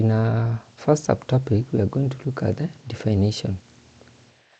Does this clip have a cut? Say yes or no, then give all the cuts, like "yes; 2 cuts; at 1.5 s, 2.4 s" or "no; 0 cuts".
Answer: no; 0 cuts